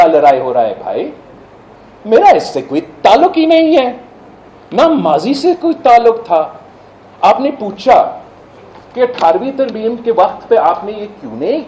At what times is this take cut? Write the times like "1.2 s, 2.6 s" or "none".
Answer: none